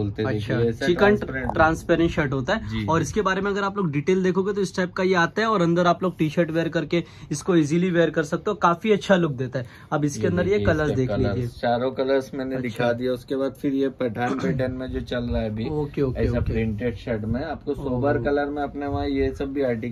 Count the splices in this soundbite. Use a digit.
0